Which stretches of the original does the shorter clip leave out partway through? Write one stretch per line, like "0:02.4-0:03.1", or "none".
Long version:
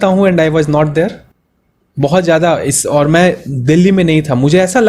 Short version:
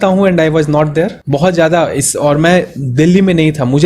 0:01.2-0:01.9